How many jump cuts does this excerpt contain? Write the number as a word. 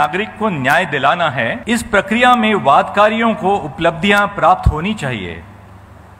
one